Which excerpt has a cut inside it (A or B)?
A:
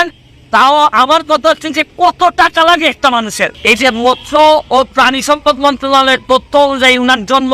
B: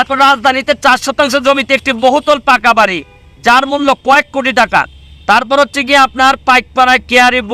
A